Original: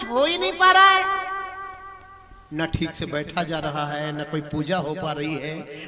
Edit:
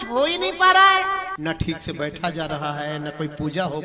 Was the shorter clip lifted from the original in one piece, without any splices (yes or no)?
no